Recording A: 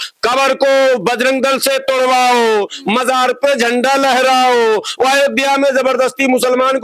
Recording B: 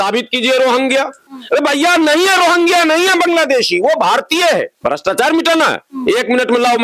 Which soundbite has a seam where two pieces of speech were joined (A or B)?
B